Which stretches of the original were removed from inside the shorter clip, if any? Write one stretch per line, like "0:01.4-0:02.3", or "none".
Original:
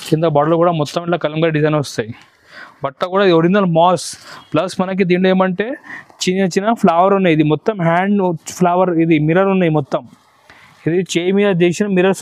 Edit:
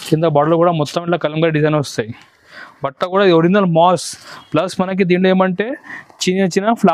none